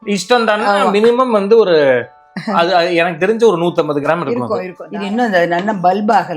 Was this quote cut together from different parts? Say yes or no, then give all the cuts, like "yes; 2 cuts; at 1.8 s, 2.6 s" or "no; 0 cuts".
yes; 1 cut; at 4.8 s